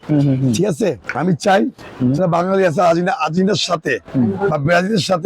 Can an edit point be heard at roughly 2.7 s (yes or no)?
no